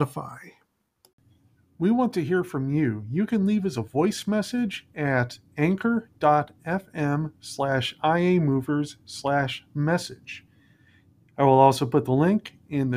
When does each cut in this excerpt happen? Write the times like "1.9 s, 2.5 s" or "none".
0.9 s

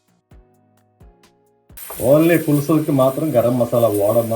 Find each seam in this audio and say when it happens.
1.8 s

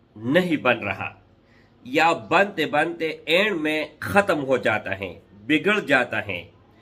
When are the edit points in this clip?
none

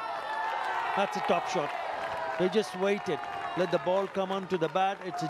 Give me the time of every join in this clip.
none

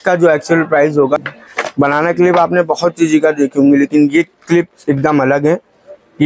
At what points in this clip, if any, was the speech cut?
1.2 s

